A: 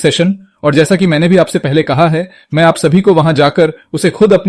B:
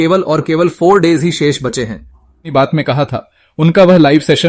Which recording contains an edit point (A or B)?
B